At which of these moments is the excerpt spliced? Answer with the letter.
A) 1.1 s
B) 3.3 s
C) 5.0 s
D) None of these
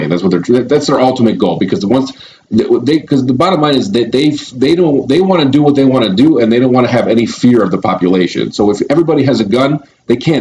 D